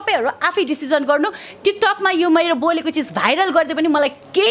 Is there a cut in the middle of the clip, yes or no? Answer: no